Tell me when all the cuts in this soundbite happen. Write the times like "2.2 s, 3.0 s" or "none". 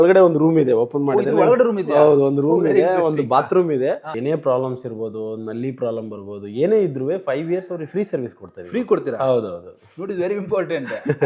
4.1 s